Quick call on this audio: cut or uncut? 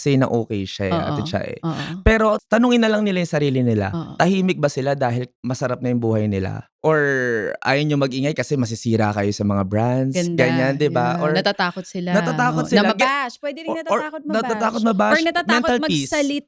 uncut